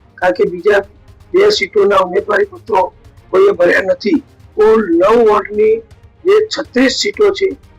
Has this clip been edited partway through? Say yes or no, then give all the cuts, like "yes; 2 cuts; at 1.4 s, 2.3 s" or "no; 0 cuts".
yes; 1 cut; at 4.4 s